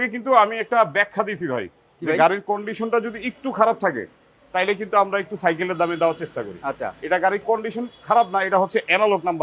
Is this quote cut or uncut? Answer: uncut